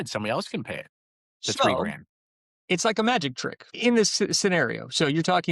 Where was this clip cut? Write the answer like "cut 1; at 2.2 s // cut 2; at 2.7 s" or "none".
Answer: cut 1; at 3.7 s